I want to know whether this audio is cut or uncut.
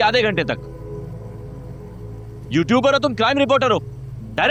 uncut